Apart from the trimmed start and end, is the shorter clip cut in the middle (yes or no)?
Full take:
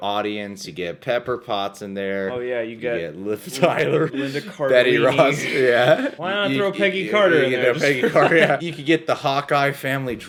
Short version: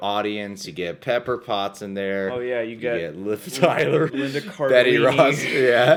no